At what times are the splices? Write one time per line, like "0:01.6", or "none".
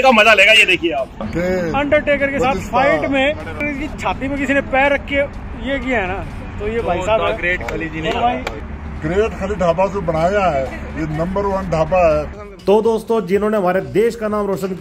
0:01.3
0:03.6
0:08.7
0:12.4

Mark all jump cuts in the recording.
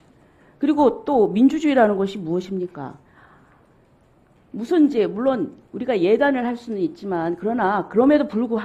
none

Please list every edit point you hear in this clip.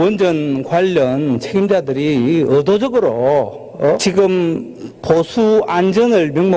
0:04.0

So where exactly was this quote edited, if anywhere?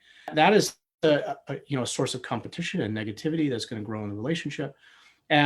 none

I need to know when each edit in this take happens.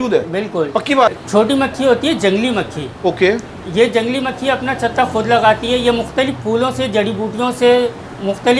0:01.1

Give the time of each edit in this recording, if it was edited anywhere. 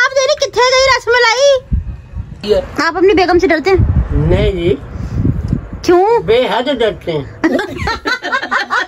0:02.4
0:07.5

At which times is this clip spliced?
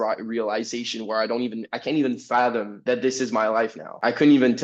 none

